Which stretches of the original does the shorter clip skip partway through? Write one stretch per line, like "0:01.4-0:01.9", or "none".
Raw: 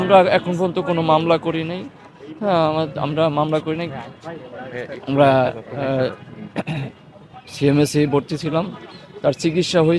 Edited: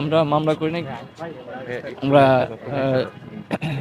none